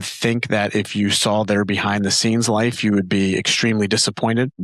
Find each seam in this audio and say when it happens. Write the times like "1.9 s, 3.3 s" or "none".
none